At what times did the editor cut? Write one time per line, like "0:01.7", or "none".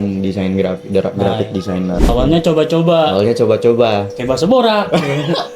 0:02.1